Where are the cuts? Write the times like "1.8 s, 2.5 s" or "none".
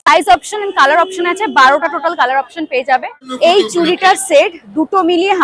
3.2 s